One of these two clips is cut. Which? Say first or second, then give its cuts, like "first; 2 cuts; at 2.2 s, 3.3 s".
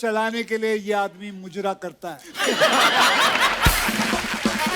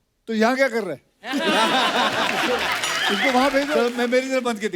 second; 1 cut; at 3.7 s